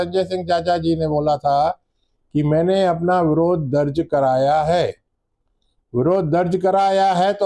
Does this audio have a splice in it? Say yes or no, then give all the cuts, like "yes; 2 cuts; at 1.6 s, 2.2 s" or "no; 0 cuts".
no; 0 cuts